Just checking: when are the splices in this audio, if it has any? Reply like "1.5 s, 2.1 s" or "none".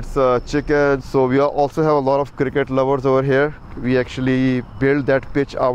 1.0 s